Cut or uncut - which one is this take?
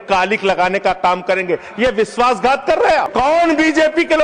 cut